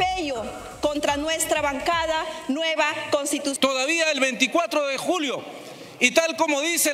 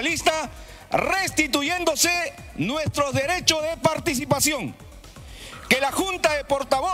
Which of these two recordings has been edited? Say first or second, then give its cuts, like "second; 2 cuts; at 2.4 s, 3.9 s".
first; 1 cut; at 3.6 s